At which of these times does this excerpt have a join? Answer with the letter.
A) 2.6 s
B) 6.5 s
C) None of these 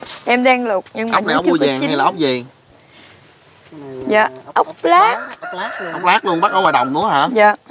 C